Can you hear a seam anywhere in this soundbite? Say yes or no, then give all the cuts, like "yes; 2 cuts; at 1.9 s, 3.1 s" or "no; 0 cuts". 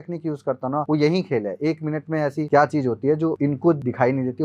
yes; 3 cuts; at 0.8 s, 2.4 s, 3.6 s